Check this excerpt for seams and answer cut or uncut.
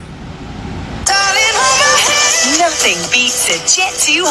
cut